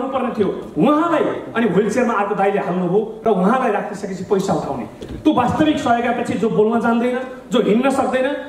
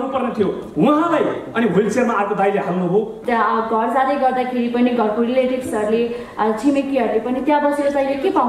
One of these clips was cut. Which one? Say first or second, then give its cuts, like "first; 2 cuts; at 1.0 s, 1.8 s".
second; 1 cut; at 3.2 s